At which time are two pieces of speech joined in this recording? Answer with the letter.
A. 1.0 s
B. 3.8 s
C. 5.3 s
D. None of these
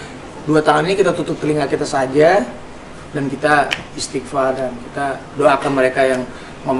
D